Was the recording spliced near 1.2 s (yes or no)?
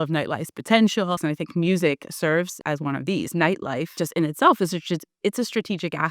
yes